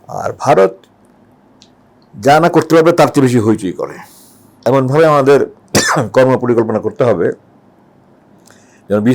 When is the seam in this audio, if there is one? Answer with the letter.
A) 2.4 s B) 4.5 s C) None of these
B